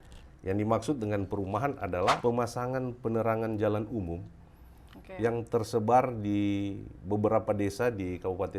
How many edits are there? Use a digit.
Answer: 1